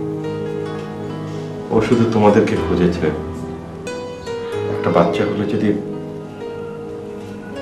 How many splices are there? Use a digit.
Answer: 1